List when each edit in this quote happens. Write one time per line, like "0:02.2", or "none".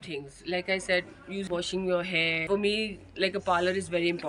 0:01.4
0:02.4